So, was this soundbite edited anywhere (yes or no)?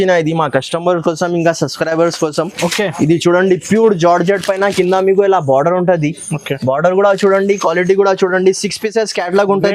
no